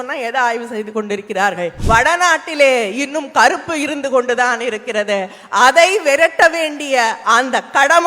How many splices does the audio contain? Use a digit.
1